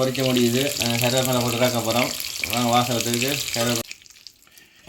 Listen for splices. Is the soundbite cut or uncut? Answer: cut